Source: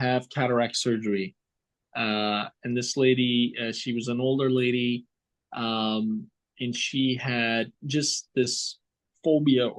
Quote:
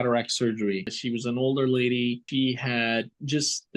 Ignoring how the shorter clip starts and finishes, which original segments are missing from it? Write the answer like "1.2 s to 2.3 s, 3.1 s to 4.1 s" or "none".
1.4 s to 3.8 s, 5.0 s to 6.8 s